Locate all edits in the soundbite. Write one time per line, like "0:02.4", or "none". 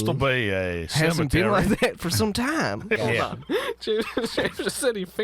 0:03.0